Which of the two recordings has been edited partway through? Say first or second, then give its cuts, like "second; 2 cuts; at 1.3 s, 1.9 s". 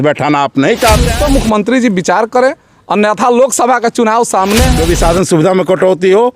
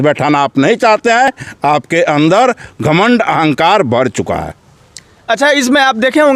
first; 2 cuts; at 1.1 s, 4.7 s